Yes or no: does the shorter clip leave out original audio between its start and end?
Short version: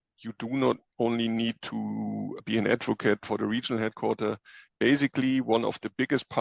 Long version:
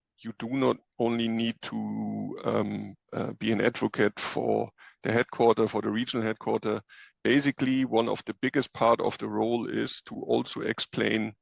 yes